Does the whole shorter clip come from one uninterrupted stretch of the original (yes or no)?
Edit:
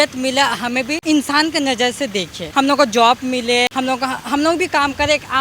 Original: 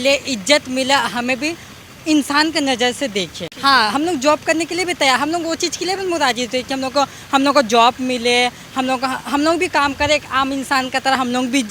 no